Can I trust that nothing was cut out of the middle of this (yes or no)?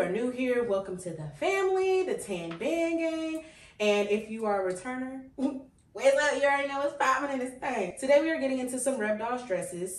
yes